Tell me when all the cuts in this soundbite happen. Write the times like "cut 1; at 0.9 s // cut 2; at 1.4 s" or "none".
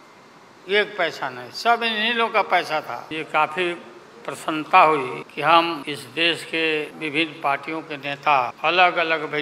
cut 1; at 3.1 s // cut 2; at 5.2 s // cut 3; at 5.8 s // cut 4; at 6.9 s // cut 5; at 8.5 s